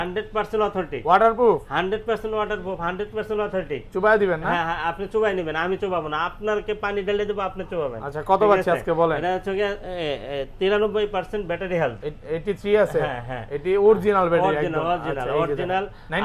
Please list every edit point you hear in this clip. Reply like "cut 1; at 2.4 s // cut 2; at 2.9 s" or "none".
none